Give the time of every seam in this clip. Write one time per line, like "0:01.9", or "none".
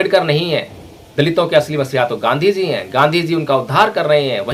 none